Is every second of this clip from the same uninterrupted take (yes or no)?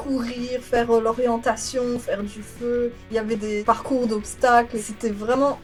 yes